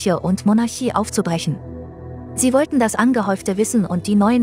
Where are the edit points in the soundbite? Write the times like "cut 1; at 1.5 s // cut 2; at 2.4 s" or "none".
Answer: none